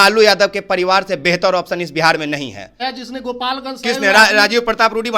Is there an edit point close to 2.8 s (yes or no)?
yes